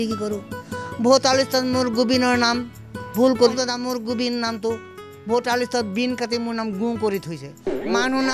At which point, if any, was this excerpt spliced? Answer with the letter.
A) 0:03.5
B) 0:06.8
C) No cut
A